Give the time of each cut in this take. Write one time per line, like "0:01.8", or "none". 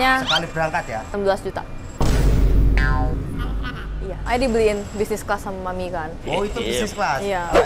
0:01.0
0:04.2

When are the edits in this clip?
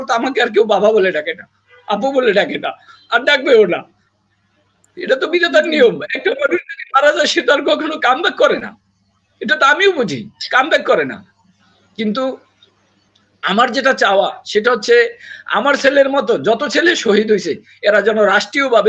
none

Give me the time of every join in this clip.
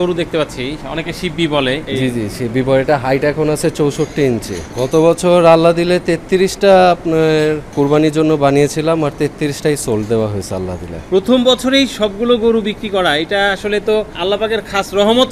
0:00.8
0:01.8
0:04.6
0:07.7
0:11.0

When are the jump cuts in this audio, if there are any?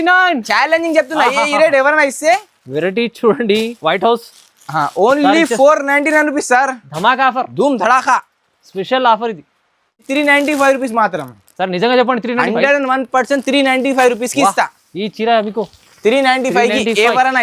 0:10.1

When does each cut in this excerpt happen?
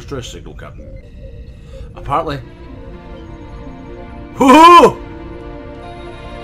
0:01.1

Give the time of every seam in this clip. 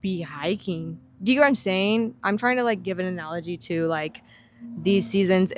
none

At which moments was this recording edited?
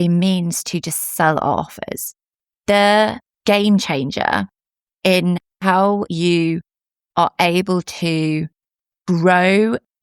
0:03.3
0:05.7

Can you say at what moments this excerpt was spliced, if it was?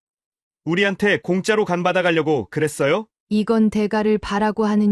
0:03.2

